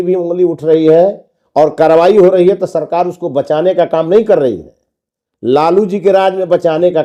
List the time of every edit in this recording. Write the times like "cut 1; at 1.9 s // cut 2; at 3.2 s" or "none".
none